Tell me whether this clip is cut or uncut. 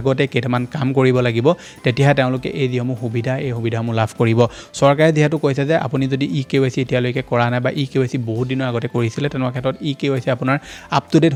uncut